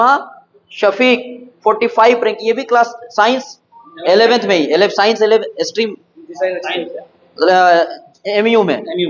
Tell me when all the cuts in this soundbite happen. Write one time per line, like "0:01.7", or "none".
none